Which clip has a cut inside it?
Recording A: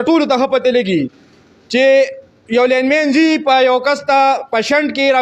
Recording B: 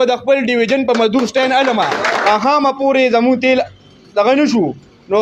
B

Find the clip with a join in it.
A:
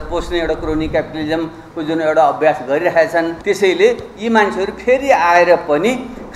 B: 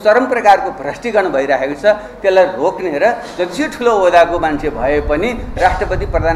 A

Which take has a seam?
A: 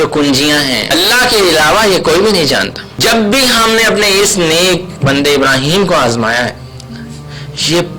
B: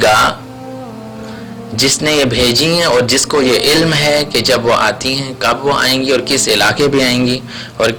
A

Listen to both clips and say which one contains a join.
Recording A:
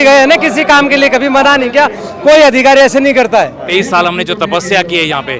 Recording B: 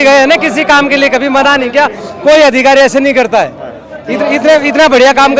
A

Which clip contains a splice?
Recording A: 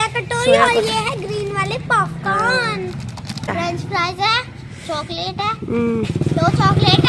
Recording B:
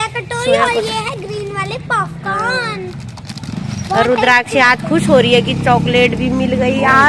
A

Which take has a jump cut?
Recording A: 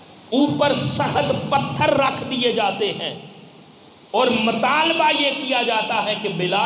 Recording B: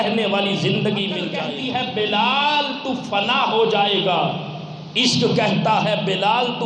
B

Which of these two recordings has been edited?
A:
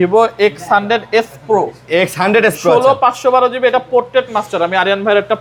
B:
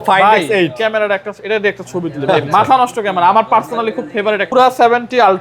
B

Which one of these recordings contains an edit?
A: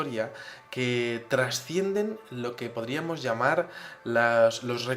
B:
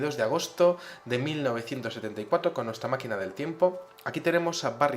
B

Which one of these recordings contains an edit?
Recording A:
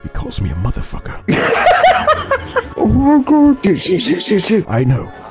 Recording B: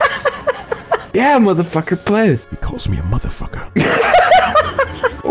B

